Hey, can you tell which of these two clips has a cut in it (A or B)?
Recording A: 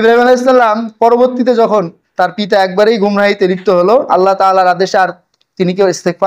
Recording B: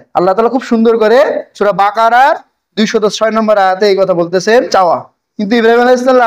B